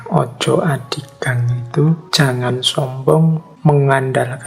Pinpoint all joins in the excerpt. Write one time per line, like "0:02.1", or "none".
0:02.1
0:03.5